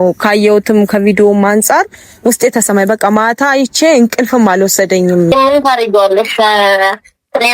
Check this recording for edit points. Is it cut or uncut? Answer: cut